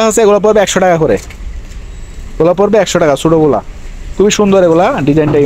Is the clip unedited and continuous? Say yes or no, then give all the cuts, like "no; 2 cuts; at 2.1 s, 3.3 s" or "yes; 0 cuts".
yes; 0 cuts